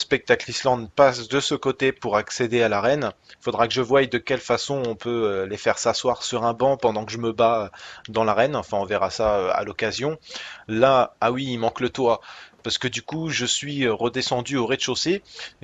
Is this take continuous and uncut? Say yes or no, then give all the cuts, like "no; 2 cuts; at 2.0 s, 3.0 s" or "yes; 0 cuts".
no; 1 cut; at 1.9 s